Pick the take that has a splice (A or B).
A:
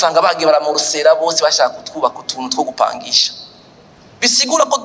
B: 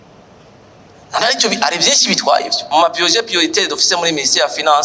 B